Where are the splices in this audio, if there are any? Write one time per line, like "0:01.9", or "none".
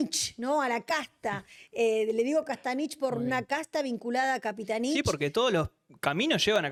none